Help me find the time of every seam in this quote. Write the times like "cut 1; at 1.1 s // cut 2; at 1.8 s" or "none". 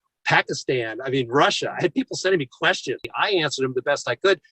cut 1; at 3.0 s